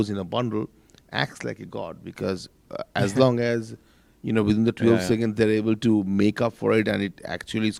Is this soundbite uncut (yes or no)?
yes